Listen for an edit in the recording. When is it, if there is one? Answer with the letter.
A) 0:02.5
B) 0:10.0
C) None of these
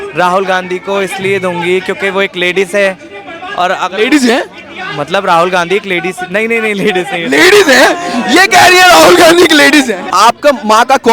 B